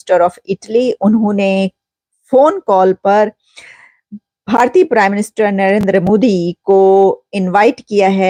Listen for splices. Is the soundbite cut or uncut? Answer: uncut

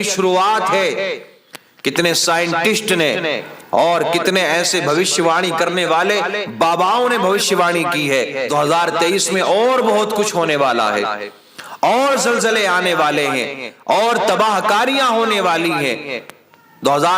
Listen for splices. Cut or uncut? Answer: cut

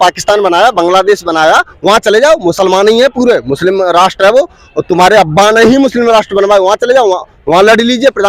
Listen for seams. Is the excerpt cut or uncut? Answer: uncut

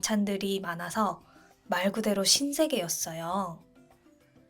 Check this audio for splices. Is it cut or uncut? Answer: cut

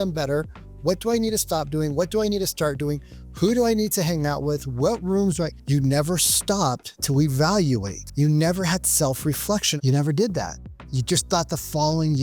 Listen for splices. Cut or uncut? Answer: cut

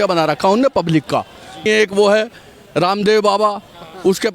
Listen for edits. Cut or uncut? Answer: cut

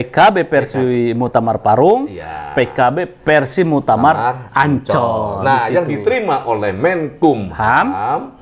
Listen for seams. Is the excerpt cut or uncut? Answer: uncut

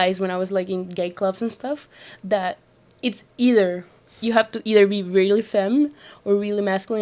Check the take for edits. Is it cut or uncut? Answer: uncut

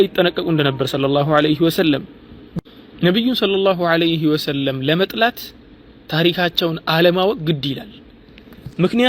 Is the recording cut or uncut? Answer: uncut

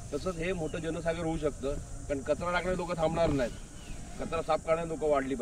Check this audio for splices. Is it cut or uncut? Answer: uncut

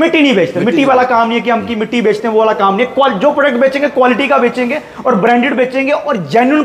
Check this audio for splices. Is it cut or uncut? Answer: uncut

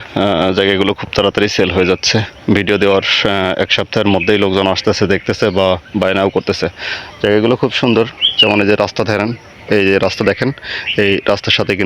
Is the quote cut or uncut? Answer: uncut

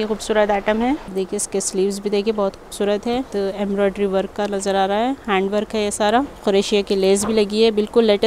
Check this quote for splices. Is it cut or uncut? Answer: cut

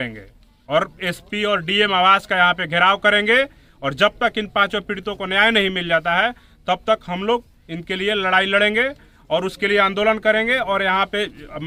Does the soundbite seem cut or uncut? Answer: uncut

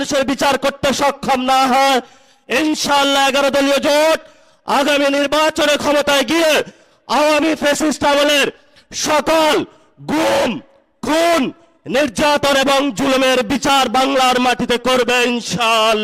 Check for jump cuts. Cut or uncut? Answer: uncut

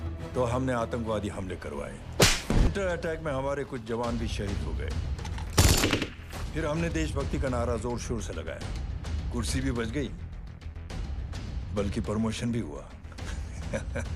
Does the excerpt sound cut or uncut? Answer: cut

